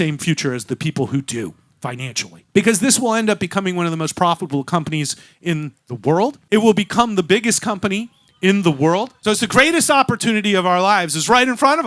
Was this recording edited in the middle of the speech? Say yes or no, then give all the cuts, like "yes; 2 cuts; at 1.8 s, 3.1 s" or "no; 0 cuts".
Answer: yes; 3 cuts; at 2.4 s, 6.4 s, 9.1 s